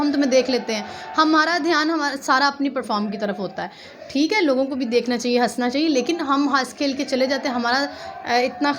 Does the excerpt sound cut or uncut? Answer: uncut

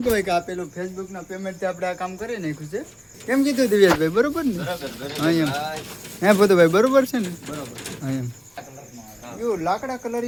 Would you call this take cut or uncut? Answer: uncut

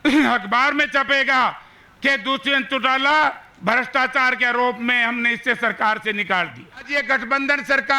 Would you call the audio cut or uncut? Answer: cut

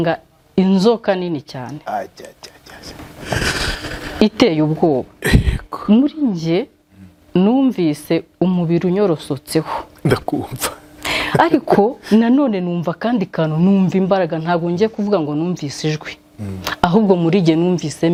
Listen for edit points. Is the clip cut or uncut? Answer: uncut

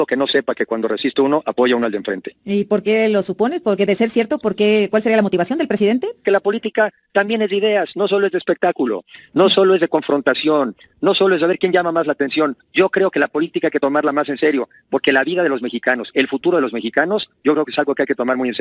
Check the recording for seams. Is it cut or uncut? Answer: cut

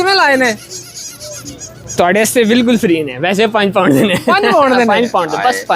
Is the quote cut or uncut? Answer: uncut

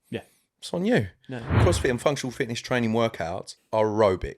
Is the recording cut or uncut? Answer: cut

